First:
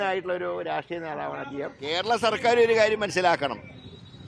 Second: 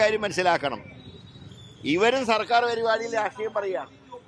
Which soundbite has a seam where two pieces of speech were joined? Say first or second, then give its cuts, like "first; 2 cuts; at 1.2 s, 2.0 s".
first; 1 cut; at 1.8 s